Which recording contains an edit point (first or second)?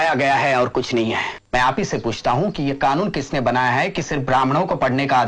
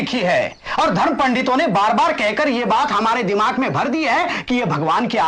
first